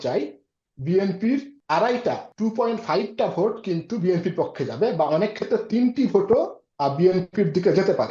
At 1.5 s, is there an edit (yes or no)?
yes